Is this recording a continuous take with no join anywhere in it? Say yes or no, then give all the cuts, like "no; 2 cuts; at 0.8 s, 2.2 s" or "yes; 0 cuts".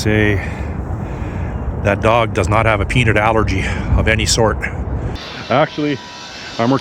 no; 1 cut; at 5.2 s